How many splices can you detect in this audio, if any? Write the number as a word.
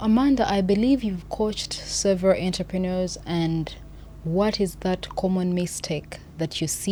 zero